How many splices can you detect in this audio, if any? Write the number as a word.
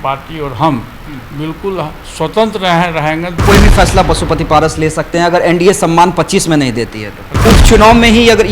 two